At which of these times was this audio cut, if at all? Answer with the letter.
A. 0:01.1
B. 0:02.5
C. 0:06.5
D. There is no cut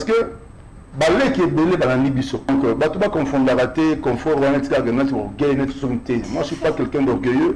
B